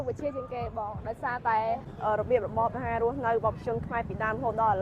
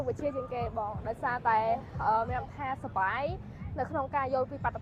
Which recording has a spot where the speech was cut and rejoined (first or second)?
first